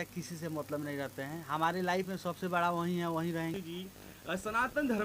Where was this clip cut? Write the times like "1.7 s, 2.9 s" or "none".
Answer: 3.6 s